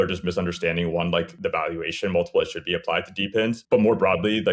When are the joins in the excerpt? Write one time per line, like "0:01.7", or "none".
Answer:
0:01.3
0:03.6